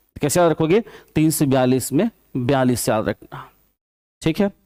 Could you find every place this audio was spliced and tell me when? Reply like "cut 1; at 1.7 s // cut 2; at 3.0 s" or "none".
none